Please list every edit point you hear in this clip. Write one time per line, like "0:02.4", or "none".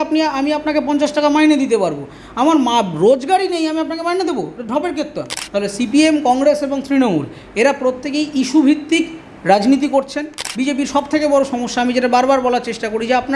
0:05.3
0:10.4